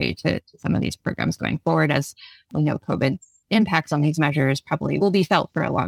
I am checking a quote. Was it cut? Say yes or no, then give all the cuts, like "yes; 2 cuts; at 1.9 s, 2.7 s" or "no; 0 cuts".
yes; 2 cuts; at 2.5 s, 5.0 s